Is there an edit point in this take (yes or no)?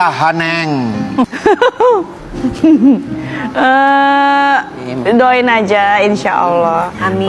no